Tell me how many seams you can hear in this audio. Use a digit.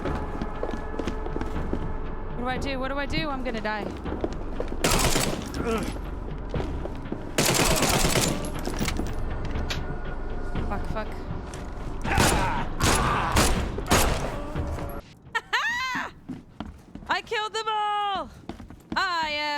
2